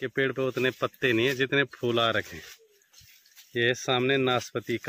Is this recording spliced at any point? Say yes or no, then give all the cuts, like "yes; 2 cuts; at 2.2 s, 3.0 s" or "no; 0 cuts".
no; 0 cuts